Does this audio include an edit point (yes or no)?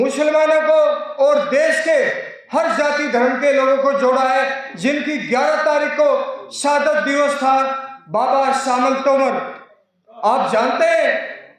no